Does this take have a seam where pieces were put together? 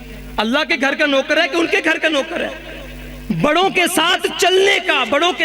no; 0 cuts

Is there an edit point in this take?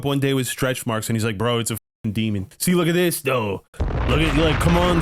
yes; 1 cut; at 2.5 s

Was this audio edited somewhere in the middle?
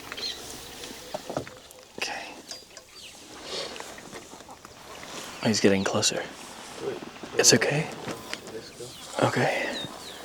yes; 1 cut; at 0.9 s

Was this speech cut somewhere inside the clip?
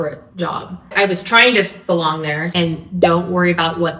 yes; 2 cuts; at 0.9 s, 2.5 s

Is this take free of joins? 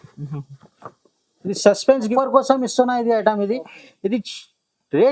no; 1 cut; at 2.1 s

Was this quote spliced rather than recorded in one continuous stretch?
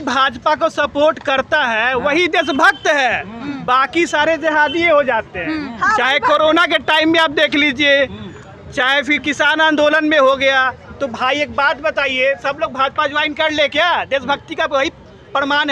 no; 0 cuts

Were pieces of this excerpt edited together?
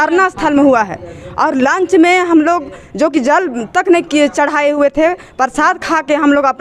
no; 0 cuts

